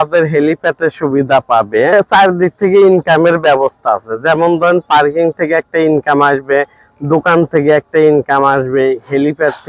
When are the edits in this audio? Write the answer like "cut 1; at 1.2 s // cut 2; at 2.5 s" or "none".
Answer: cut 1; at 1.9 s